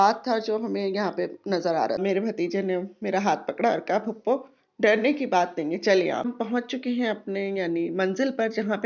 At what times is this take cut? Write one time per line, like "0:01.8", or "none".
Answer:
0:02.0
0:06.2